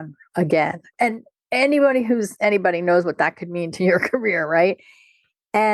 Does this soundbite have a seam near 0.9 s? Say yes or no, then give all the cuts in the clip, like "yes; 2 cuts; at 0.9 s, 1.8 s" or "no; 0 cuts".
yes; 1 cut; at 0.9 s